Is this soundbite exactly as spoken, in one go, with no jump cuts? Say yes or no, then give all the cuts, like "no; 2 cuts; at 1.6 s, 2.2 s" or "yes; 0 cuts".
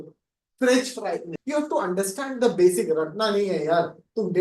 no; 1 cut; at 1.3 s